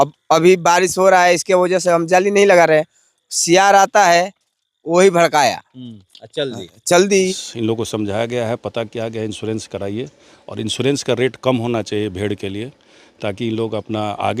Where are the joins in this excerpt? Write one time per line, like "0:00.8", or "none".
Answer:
0:07.4